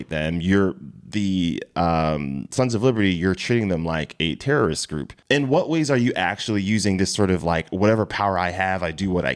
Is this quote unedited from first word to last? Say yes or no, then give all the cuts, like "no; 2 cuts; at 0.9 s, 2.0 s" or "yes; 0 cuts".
yes; 0 cuts